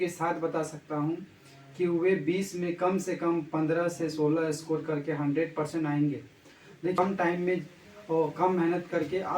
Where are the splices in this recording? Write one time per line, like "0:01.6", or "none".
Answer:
0:07.0